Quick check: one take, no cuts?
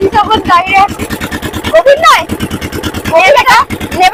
yes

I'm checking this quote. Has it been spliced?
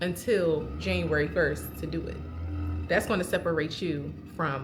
no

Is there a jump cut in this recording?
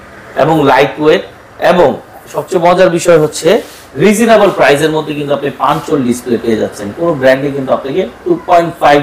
no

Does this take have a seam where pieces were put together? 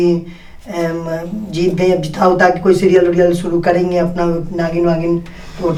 no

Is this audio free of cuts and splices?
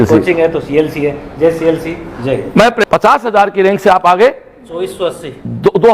no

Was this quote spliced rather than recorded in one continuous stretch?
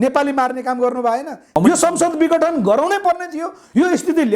yes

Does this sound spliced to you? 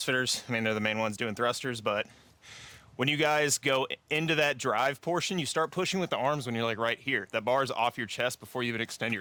no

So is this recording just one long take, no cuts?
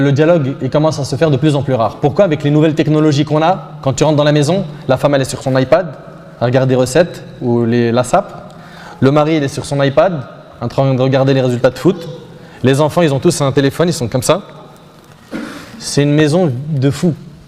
yes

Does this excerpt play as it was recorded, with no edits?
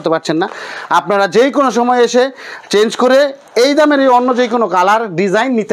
yes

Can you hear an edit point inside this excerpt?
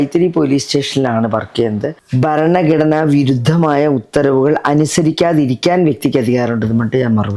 yes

